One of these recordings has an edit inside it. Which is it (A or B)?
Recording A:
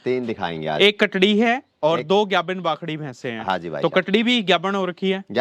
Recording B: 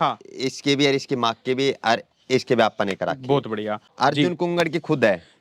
B